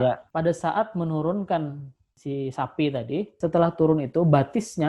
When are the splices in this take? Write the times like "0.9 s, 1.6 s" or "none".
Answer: 3.3 s